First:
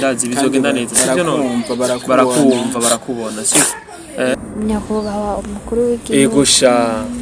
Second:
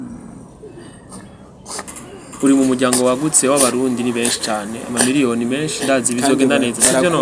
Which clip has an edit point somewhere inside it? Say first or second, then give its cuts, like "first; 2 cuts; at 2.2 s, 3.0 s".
first; 1 cut; at 4.4 s